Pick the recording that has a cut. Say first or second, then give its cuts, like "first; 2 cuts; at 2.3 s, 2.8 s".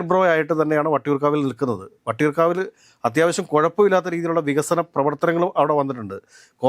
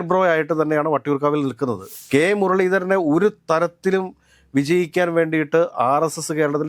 second; 1 cut; at 1.9 s